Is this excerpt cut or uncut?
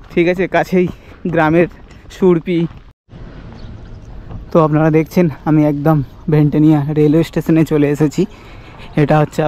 cut